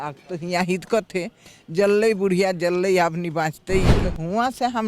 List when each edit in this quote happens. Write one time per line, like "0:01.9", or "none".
0:03.9